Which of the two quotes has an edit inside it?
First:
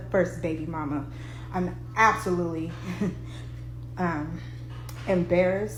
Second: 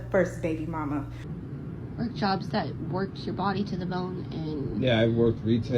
second; 1 cut; at 1.2 s

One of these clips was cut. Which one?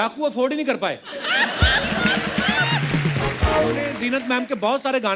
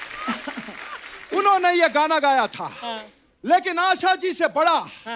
first; 1 cut; at 3.9 s

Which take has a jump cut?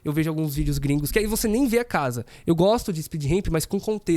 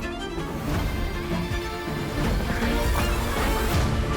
first; 1 cut; at 1.1 s

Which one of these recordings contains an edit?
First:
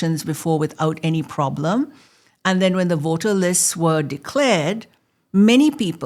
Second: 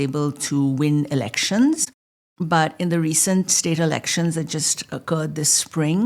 second; 1 cut; at 1.9 s

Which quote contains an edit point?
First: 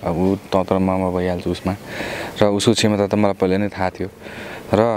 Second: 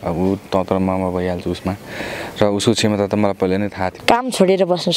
second; 1 cut; at 4.0 s

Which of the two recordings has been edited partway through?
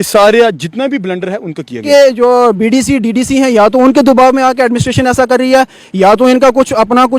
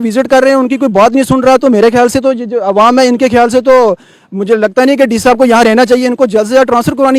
first; 1 cut; at 1.8 s

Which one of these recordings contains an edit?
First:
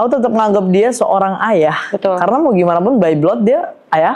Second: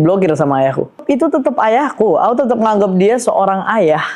second; 1 cut; at 1.0 s

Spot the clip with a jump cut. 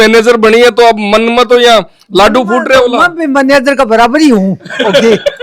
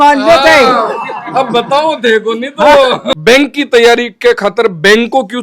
second; 1 cut; at 3.1 s

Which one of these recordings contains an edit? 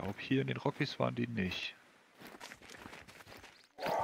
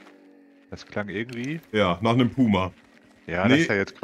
first; 1 cut; at 2.3 s

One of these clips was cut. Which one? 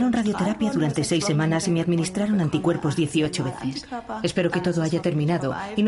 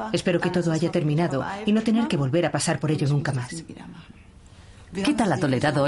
first; 1 cut; at 2.0 s

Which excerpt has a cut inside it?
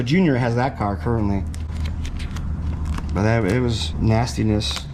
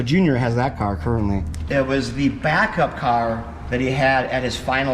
second; 1 cut; at 1.6 s

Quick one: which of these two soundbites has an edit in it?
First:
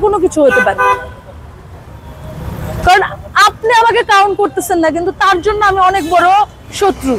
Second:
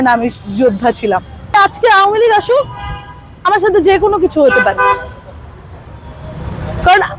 second; 1 cut; at 1.5 s

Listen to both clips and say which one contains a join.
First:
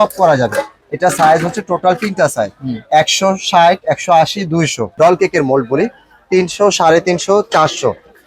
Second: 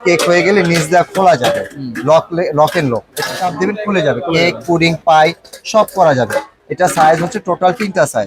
first; 1 cut; at 4.9 s

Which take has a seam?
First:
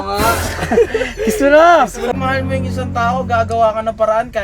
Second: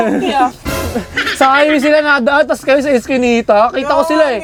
first; 1 cut; at 2.1 s

